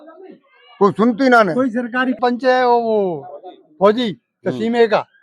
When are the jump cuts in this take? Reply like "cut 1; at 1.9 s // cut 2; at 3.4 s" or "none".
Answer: cut 1; at 2.2 s